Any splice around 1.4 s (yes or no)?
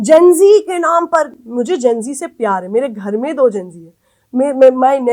no